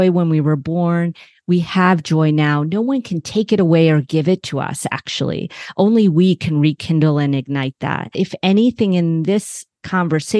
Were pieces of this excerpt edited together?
yes; 1 cut; at 8.1 s

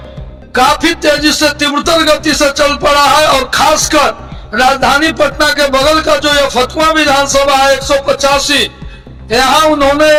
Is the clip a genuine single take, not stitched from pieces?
yes; 0 cuts

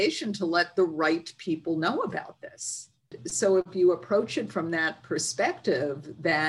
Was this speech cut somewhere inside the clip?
yes; 1 cut; at 3.2 s

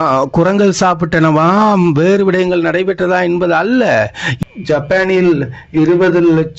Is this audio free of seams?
no; 1 cut; at 4.2 s

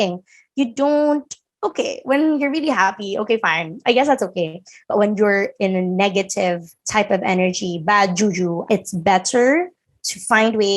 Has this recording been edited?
yes; 1 cut; at 8.6 s

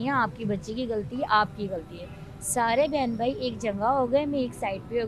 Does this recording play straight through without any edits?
yes; 0 cuts

